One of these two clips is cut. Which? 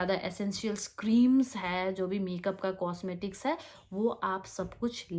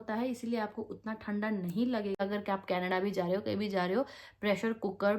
second; 1 cut; at 2.2 s

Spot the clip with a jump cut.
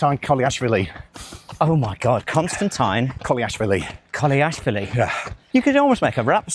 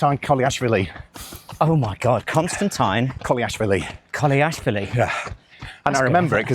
first; 1 cut; at 5.3 s

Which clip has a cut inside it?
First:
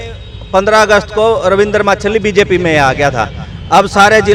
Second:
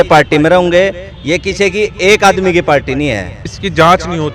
second; 1 cut; at 3.4 s

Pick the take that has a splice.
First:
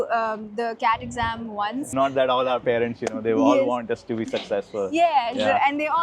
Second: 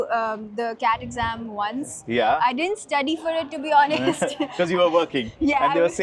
first; 1 cut; at 1.9 s

